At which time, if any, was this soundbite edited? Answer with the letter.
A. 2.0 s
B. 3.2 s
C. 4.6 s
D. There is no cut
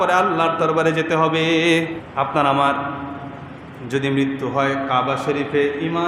A